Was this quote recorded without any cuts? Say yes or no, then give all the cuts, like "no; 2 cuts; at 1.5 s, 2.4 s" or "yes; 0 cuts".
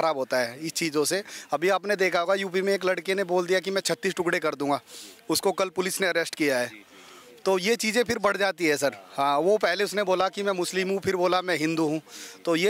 yes; 0 cuts